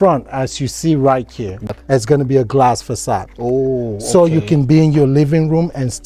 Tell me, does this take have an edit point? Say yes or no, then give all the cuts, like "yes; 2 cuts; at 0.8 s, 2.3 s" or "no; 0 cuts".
no; 0 cuts